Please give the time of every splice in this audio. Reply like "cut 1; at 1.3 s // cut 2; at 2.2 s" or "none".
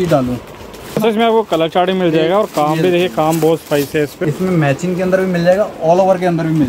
cut 1; at 1.0 s // cut 2; at 4.2 s